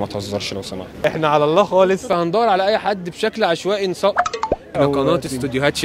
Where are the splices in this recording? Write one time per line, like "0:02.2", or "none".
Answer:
0:01.1
0:02.1
0:04.7